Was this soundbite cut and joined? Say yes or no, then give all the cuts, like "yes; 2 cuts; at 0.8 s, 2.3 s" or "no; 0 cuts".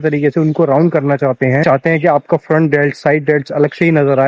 yes; 1 cut; at 1.6 s